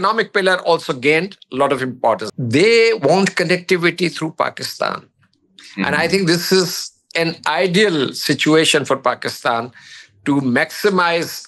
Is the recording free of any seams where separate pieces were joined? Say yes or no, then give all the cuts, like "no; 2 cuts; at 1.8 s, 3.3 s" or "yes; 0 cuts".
no; 1 cut; at 2.2 s